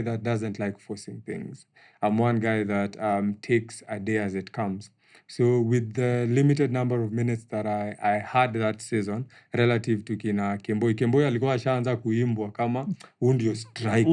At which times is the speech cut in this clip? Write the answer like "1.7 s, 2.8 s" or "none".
none